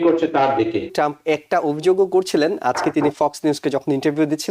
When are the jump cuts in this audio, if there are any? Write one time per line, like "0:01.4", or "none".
0:00.9

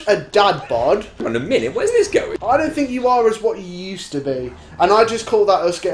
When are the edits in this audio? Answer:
0:01.2
0:02.3

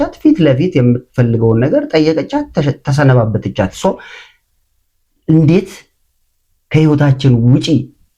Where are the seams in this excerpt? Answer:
none

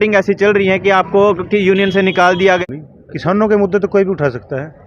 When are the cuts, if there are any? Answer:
0:02.6

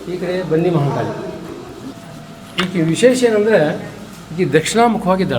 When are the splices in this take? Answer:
0:01.9

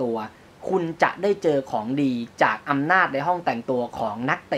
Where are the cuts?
none

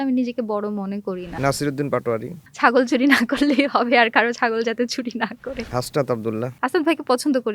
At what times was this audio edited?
0:01.3
0:02.4
0:05.7
0:06.5

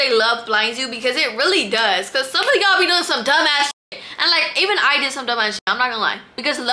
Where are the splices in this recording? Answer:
none

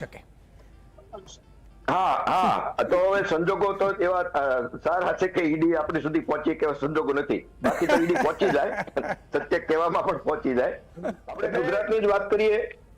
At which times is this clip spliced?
0:11.6

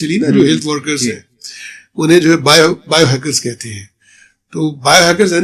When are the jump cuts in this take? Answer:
none

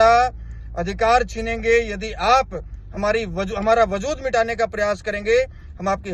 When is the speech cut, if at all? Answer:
none

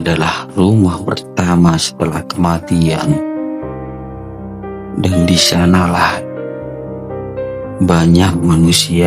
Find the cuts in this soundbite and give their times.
0:03.1
0:04.9

